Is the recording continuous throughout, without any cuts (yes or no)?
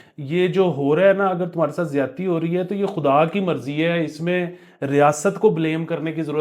yes